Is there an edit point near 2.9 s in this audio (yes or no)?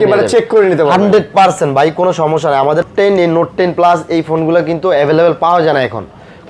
yes